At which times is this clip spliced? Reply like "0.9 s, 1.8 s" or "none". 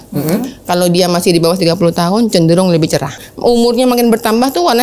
3.3 s